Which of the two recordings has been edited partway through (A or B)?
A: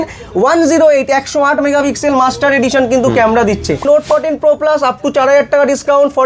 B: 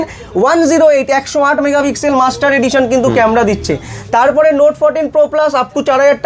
A